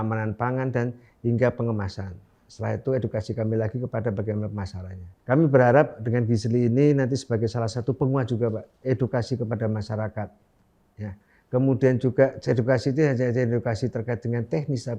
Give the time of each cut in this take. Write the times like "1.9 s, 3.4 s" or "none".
5.1 s